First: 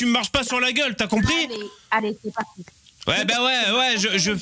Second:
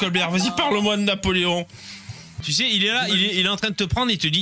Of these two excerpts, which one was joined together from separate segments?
second; 1 cut; at 2.4 s

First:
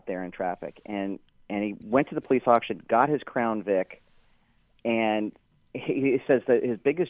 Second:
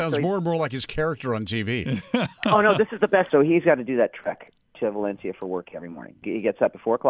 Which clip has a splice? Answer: second; 1 cut; at 6.2 s

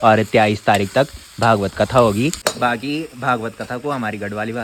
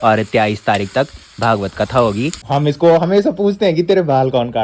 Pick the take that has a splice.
second; 1 cut; at 2.4 s

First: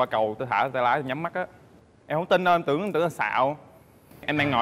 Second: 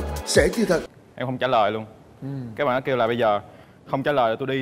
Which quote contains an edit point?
second; 1 cut; at 1.0 s

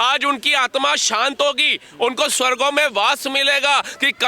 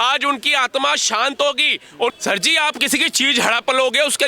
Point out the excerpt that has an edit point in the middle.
second; 1 cut; at 2.1 s

